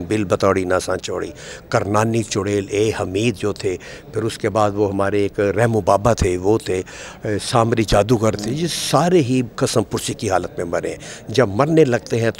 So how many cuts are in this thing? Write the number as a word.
zero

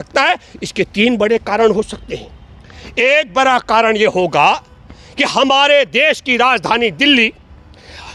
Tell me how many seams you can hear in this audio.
zero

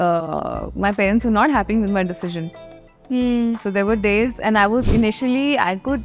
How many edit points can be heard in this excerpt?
one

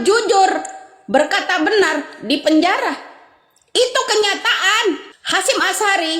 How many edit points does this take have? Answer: one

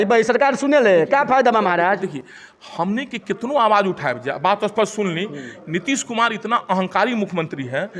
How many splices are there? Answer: zero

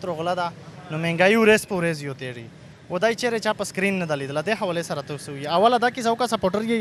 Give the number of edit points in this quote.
zero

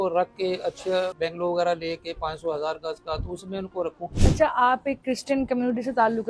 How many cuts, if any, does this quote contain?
two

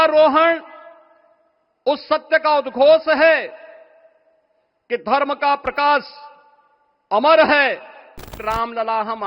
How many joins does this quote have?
one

